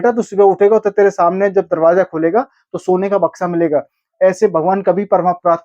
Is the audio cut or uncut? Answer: uncut